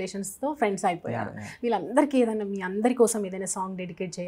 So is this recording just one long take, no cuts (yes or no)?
yes